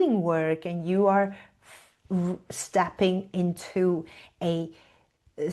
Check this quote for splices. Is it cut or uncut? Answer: uncut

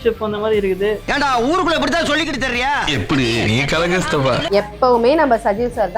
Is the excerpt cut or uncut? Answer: cut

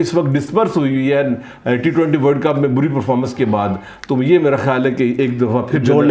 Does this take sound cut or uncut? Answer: uncut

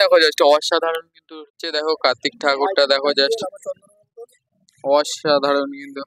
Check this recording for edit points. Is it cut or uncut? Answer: cut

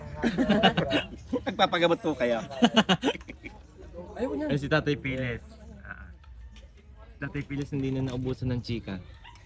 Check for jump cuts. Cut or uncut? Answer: uncut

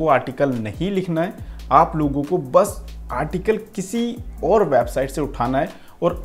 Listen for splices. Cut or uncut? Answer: uncut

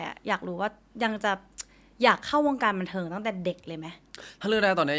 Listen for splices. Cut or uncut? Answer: cut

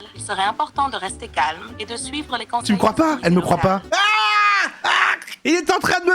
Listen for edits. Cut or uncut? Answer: cut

